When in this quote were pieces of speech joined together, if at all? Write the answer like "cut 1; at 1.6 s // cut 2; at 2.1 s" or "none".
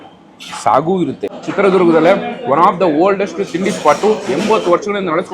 cut 1; at 1.4 s